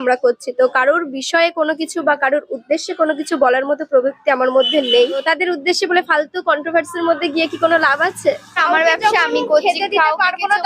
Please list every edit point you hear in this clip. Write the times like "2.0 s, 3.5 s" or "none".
5.2 s, 8.6 s